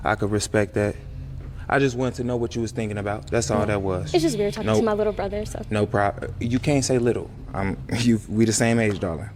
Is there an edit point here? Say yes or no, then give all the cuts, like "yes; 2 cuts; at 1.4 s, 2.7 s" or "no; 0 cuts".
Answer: no; 0 cuts